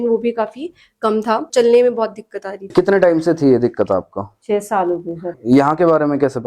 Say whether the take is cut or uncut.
cut